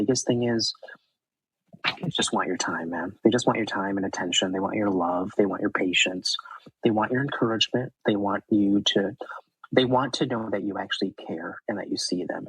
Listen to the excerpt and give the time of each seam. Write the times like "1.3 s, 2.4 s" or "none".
none